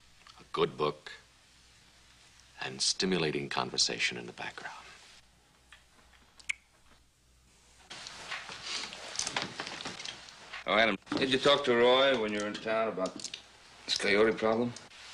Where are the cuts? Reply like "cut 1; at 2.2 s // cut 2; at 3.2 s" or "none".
none